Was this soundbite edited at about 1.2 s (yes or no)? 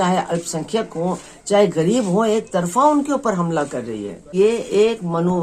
no